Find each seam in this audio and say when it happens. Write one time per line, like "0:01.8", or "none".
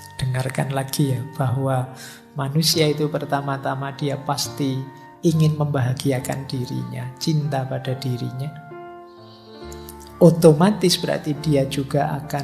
0:08.6
0:10.2

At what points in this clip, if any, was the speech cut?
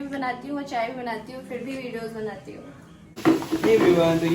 0:03.2

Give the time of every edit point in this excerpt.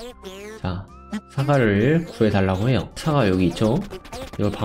0:03.0

